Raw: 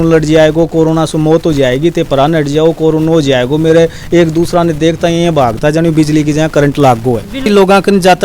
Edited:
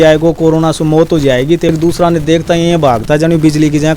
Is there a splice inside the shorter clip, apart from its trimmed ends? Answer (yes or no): yes